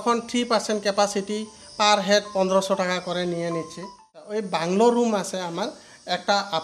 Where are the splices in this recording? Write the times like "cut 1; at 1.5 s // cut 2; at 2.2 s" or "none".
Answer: cut 1; at 4.3 s